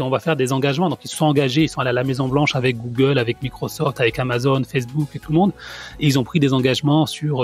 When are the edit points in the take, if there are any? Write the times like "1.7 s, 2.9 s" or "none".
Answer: none